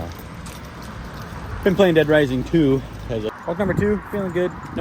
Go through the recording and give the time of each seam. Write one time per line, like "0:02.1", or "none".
0:03.4